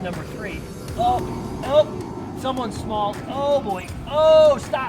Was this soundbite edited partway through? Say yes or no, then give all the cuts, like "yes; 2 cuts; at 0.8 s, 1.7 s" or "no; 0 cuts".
yes; 1 cut; at 0.9 s